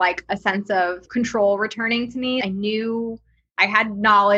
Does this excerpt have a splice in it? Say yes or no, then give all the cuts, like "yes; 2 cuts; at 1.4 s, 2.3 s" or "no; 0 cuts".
yes; 2 cuts; at 1.0 s, 2.4 s